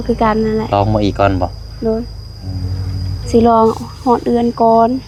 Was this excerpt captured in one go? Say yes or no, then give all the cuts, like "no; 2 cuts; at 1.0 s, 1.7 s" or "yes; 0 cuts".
yes; 0 cuts